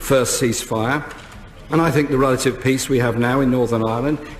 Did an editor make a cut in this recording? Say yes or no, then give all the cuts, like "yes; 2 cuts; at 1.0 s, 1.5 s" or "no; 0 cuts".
yes; 1 cut; at 1.2 s